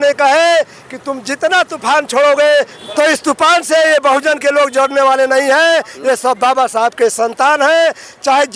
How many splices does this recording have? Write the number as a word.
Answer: one